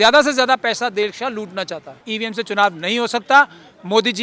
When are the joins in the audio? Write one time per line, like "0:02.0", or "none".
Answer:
0:02.1